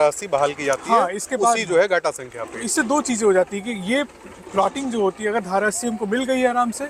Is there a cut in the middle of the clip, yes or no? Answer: no